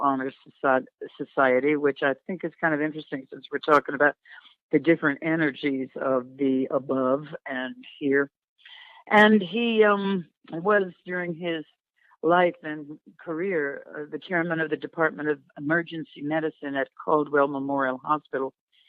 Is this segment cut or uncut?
uncut